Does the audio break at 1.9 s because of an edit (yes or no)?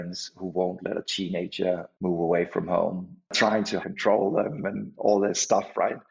yes